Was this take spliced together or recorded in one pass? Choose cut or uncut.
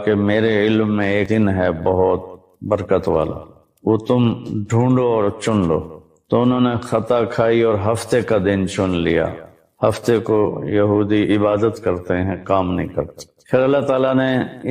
cut